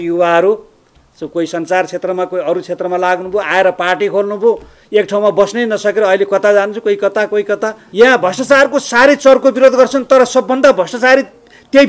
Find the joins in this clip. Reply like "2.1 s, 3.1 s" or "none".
7.8 s